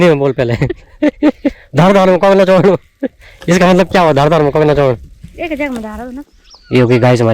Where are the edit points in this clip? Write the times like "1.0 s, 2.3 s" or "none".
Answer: 6.3 s